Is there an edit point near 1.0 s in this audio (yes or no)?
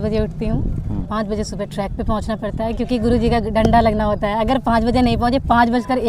yes